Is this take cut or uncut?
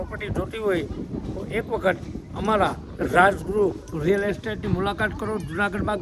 uncut